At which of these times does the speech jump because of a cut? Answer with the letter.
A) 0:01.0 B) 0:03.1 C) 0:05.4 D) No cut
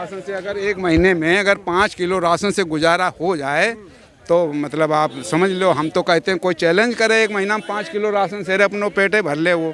D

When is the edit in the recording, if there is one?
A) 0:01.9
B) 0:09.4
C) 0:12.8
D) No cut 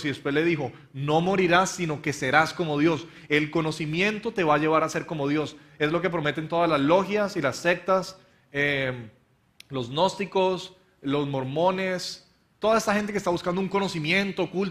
A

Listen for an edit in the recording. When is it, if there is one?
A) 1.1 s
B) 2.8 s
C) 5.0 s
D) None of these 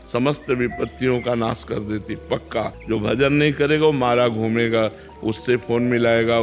B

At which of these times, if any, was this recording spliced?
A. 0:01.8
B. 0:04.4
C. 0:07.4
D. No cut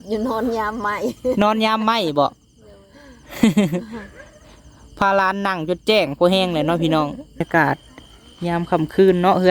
C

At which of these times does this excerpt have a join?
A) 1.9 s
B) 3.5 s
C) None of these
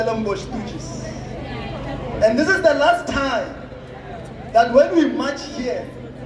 C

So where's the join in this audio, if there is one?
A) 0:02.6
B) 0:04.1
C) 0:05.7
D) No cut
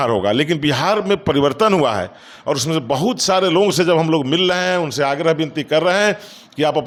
D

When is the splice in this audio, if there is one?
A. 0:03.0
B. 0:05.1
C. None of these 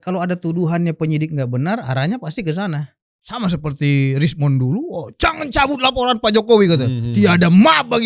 A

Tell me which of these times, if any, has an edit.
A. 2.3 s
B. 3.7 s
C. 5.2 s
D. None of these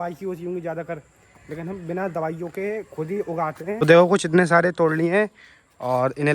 B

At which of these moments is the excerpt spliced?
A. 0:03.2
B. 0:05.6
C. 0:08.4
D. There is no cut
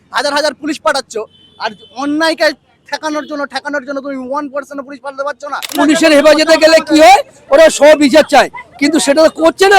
B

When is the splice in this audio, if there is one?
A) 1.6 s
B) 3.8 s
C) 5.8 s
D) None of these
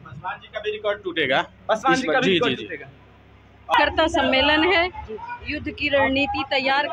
B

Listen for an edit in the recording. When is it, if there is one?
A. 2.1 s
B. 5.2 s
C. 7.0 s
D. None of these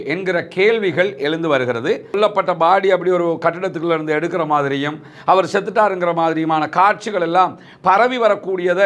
A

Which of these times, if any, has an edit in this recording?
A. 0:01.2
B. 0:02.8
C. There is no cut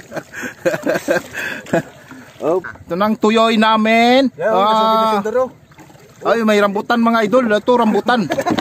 B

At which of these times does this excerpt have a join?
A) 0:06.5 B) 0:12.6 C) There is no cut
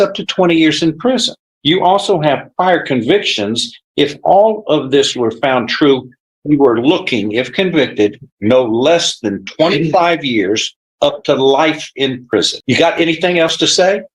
B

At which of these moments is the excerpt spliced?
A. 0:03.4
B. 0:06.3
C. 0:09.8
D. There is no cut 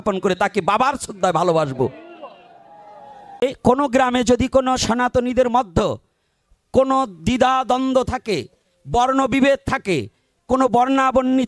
A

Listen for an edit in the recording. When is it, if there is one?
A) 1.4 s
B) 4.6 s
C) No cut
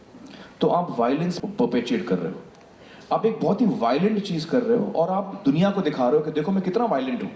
A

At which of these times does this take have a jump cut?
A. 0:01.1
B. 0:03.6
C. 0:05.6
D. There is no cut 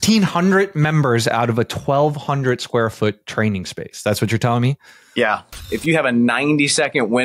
C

